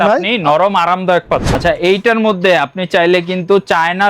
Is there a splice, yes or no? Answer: yes